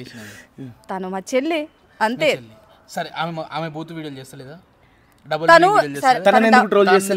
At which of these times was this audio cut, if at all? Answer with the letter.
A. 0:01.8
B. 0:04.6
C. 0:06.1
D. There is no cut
D